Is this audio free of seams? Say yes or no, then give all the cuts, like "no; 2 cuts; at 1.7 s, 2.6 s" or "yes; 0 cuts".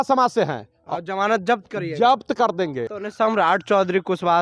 no; 1 cut; at 2.9 s